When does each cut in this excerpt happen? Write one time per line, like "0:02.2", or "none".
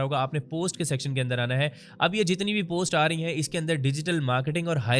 none